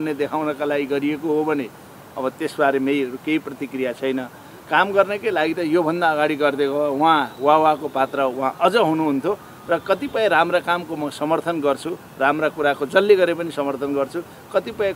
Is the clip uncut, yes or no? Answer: yes